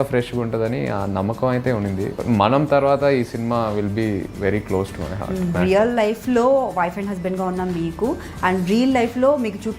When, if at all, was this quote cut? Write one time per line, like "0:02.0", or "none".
0:02.1
0:05.6